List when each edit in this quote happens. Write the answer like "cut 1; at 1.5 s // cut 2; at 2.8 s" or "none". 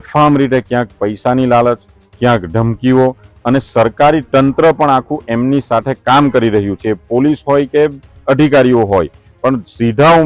none